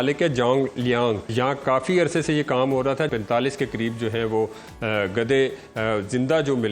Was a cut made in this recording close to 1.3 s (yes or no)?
yes